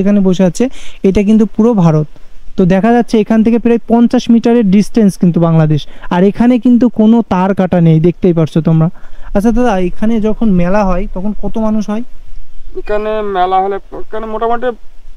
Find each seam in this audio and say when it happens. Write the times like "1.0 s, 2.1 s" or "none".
none